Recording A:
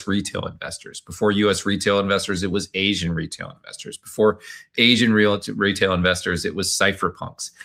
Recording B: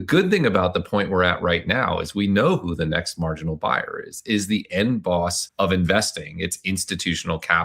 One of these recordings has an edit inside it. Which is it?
B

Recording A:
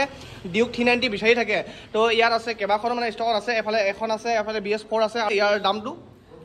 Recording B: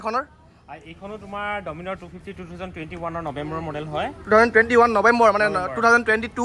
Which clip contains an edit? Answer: A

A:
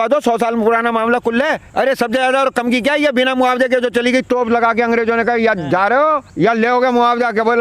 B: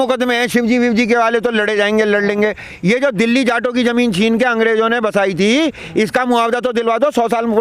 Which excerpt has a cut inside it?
A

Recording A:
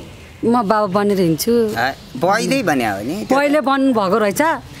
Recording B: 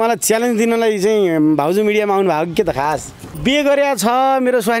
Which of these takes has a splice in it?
B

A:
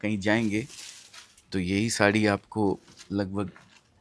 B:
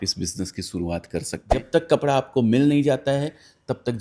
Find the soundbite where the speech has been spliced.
B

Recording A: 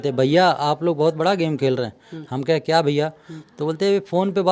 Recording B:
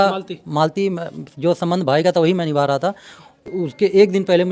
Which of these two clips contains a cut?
B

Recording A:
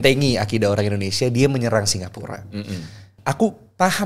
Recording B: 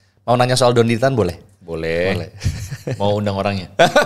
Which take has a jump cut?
A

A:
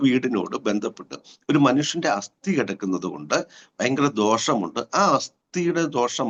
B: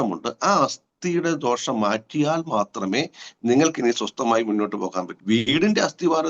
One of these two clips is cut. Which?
B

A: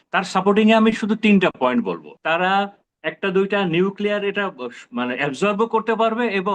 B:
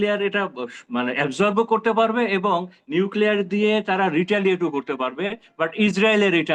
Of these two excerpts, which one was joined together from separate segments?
A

